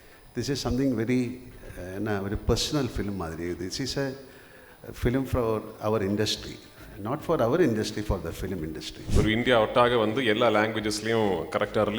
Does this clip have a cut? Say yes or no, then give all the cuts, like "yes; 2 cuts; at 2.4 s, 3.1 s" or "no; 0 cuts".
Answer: yes; 1 cut; at 8.9 s